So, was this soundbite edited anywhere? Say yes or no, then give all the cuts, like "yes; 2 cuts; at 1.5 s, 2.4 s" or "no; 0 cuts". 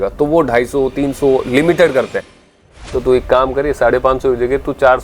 yes; 1 cut; at 2.3 s